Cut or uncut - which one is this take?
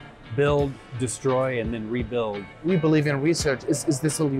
cut